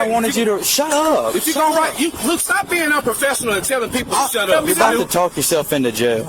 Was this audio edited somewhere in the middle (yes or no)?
yes